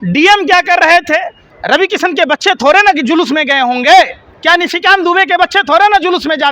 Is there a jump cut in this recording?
yes; 2 cuts; at 1.5 s, 4.3 s

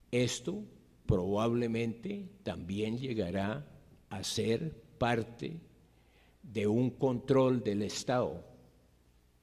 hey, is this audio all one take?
no; 1 cut; at 7.2 s

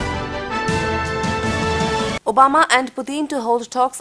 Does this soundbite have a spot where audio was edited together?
yes; 1 cut; at 1.6 s

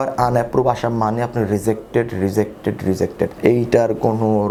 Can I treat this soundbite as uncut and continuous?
yes; 0 cuts

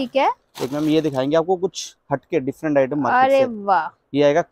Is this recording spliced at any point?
no; 0 cuts

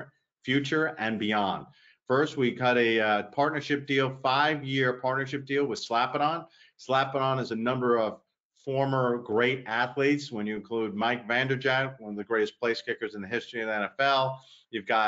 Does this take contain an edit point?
no; 0 cuts

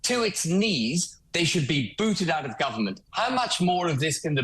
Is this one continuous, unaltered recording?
no; 2 cuts; at 1.1 s, 3.0 s

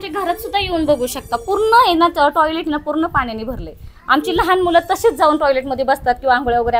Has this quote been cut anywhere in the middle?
no; 0 cuts

